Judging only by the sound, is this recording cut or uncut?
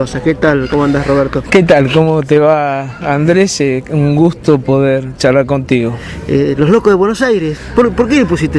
uncut